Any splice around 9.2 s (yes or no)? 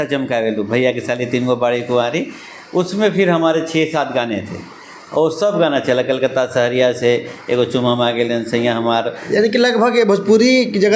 yes